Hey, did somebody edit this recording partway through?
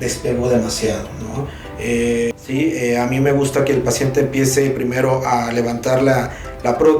yes; 1 cut; at 2.3 s

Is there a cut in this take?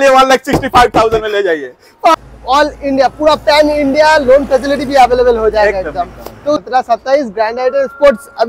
yes; 2 cuts; at 2.1 s, 6.1 s

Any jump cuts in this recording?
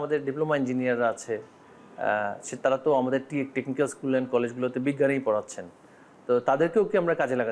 no; 0 cuts

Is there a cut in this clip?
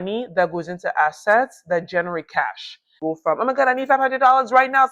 yes; 1 cut; at 2.9 s

